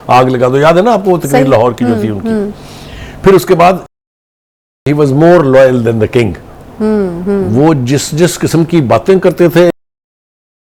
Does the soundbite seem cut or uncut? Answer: uncut